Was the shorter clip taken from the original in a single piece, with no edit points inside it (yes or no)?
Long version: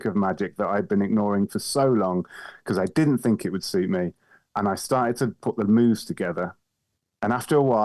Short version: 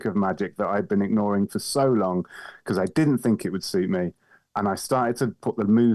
yes